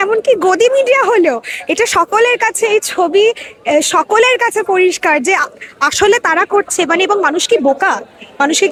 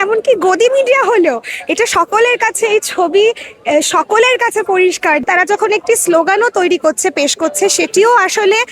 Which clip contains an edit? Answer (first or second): second